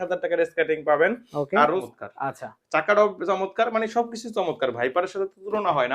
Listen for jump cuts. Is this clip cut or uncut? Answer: cut